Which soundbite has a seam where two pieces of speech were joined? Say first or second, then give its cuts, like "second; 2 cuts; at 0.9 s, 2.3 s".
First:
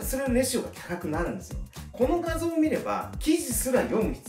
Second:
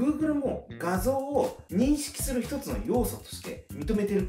first; 1 cut; at 1.7 s